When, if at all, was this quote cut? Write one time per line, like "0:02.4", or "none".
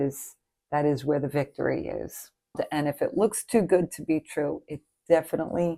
0:02.5